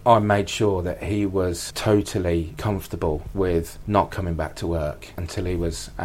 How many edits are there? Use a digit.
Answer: 1